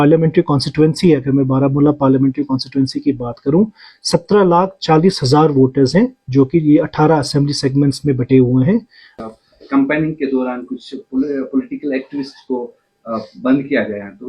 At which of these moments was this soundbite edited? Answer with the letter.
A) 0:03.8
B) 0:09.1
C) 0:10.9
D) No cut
B